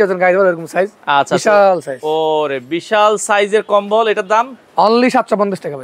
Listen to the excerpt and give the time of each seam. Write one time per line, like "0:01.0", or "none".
none